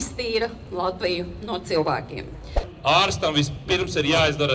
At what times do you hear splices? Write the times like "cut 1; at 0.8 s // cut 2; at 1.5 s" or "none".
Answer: cut 1; at 2.7 s